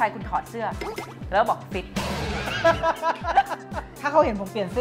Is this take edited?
yes; 1 cut; at 3.9 s

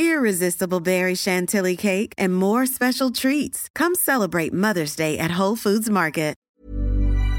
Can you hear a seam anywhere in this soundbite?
yes; 1 cut; at 6.4 s

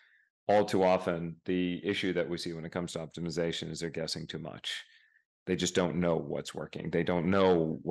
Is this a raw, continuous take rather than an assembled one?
yes; 0 cuts

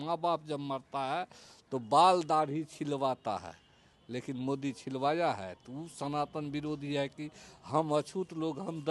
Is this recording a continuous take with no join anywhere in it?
yes; 0 cuts

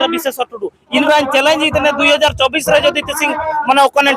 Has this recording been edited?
yes; 1 cut; at 1.0 s

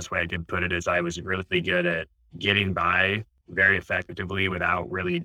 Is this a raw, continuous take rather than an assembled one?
yes; 0 cuts

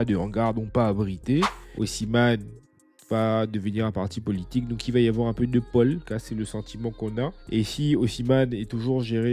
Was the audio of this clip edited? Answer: yes; 3 cuts; at 1.5 s, 6.0 s, 7.4 s

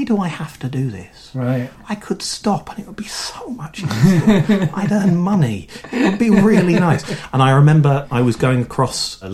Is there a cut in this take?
no; 0 cuts

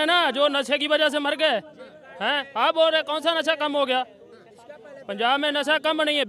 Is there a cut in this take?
no; 0 cuts

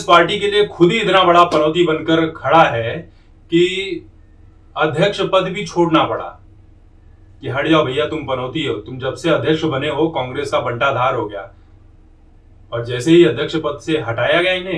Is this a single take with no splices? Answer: yes; 0 cuts

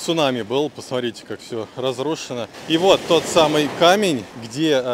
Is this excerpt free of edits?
yes; 0 cuts

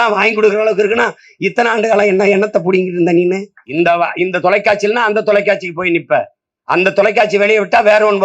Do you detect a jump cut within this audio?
yes; 1 cut; at 3.6 s

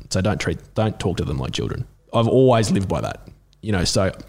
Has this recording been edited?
yes; 1 cut; at 1.9 s

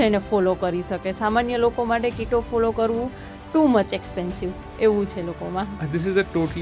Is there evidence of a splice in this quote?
no; 0 cuts

